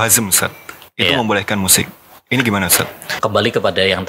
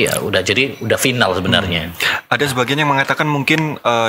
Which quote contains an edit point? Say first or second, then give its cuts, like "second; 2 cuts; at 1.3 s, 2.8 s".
first; 1 cut; at 3.1 s